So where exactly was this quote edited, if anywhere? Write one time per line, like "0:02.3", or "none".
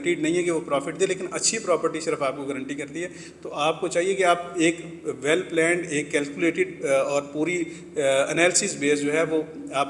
none